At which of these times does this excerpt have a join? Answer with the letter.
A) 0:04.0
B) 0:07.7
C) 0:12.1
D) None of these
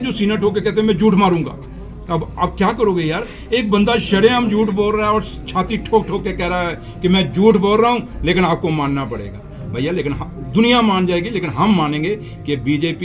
D